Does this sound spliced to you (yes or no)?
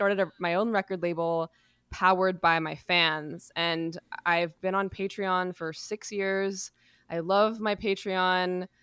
no